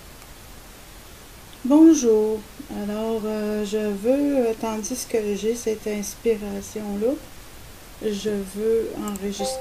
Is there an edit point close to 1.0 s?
no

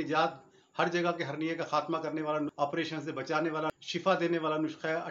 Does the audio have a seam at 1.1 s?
no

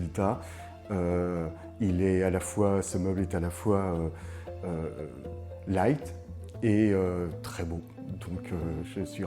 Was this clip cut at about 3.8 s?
no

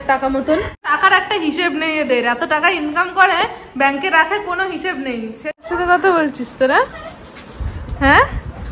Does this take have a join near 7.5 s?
no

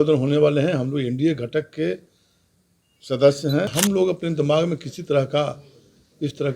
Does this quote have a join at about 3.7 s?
yes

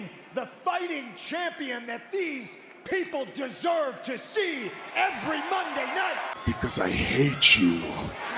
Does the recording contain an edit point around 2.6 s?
no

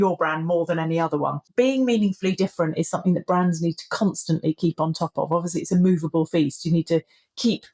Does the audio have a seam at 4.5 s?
no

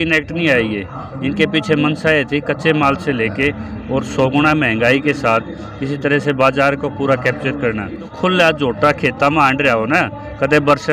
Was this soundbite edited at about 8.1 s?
yes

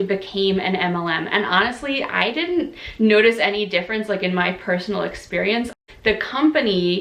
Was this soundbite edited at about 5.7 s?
yes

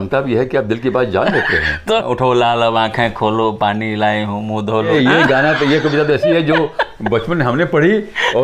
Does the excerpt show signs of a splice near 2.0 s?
yes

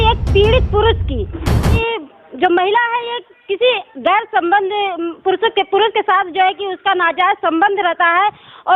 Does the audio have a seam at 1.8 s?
yes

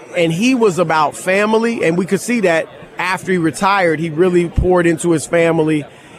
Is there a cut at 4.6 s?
no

